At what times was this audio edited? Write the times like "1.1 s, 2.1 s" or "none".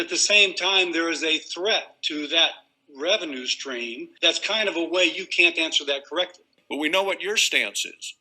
6.5 s